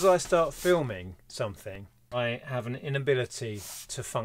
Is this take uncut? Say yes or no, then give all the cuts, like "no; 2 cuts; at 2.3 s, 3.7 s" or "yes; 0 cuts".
no; 1 cut; at 2.1 s